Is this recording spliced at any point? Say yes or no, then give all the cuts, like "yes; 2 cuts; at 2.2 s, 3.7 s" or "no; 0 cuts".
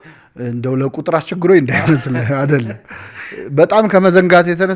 no; 0 cuts